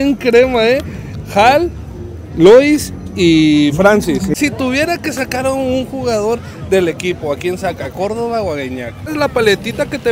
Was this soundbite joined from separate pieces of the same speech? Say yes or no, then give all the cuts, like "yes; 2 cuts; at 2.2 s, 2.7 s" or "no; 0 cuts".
yes; 2 cuts; at 4.3 s, 9.1 s